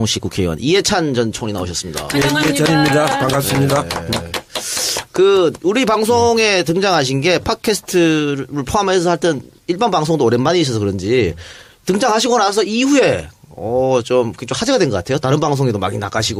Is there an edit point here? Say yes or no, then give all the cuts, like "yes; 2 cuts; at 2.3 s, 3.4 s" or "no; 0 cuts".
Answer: no; 0 cuts